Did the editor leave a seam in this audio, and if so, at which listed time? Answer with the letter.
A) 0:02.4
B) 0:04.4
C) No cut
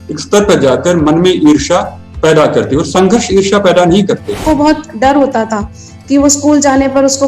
B